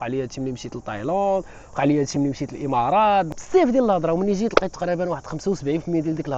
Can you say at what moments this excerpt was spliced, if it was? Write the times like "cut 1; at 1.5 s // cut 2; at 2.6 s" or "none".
cut 1; at 3.3 s